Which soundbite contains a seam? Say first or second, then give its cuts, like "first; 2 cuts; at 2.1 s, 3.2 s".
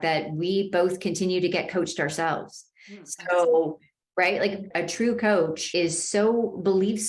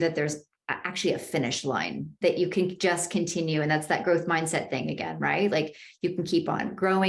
first; 2 cuts; at 4.7 s, 5.6 s